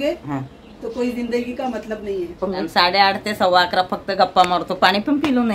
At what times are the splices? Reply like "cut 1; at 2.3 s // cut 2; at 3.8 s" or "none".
cut 1; at 2.6 s